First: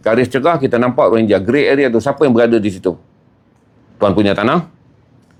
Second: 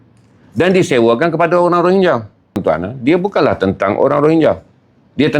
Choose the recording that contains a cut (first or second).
second